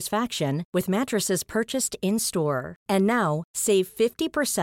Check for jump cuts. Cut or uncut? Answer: uncut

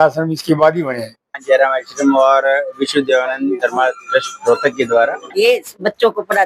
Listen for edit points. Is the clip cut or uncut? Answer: cut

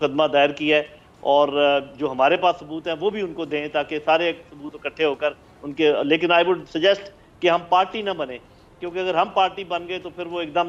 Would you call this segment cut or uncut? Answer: uncut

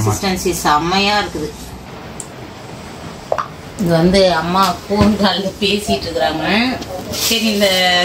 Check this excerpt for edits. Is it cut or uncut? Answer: cut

